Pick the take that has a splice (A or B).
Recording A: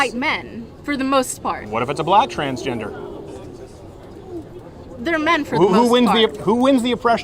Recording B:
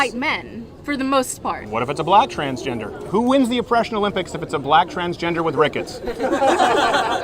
B